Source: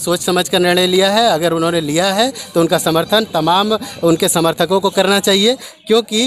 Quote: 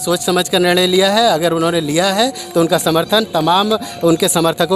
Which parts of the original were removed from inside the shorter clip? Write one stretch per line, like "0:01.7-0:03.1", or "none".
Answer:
none